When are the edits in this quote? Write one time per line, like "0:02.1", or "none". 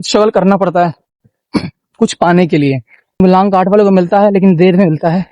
0:03.2